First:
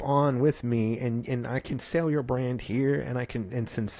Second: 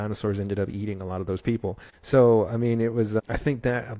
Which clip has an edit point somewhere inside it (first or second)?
second